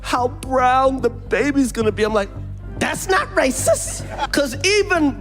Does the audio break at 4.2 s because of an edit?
yes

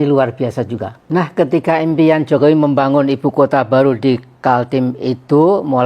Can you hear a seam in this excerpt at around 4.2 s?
no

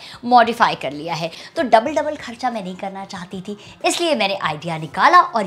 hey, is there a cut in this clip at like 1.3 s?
yes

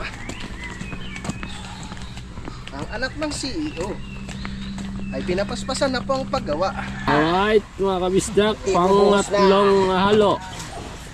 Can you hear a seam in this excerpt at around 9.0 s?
no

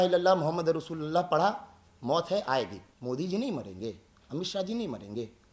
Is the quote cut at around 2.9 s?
yes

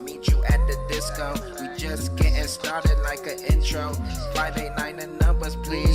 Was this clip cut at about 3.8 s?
yes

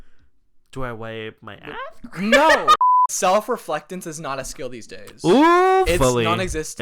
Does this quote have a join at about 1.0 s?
no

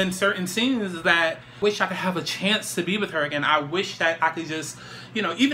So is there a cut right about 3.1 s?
no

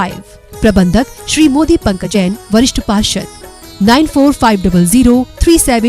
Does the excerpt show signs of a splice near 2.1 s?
yes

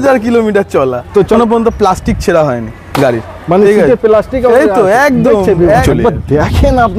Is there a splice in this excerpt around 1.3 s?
yes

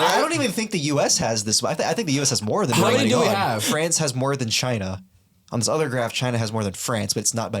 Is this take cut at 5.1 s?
no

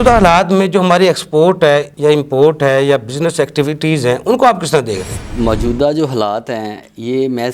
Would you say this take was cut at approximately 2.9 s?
no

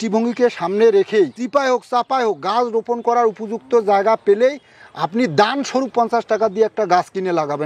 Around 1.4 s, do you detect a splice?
yes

